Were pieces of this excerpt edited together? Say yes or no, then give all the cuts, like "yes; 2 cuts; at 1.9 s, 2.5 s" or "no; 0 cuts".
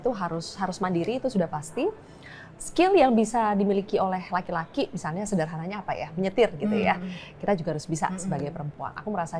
no; 0 cuts